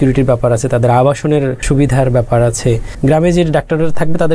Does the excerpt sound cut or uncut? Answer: cut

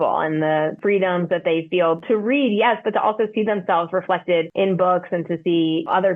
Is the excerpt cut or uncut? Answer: cut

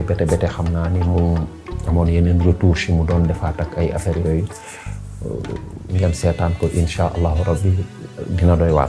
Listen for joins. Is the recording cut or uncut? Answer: uncut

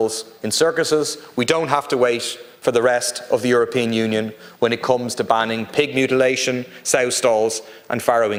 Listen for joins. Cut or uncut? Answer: uncut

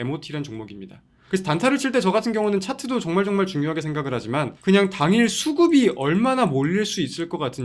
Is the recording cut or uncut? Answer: uncut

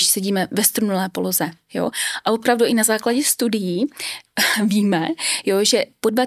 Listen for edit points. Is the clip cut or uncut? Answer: uncut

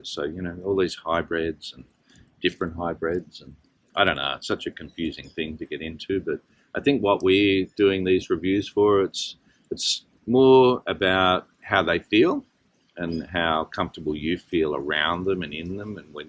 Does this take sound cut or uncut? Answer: uncut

